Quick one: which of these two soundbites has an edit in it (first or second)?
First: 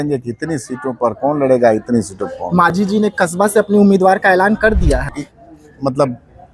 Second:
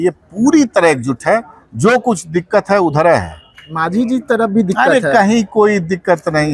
first